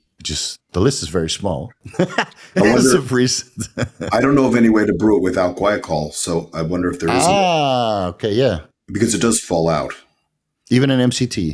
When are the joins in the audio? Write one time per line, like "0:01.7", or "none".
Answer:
none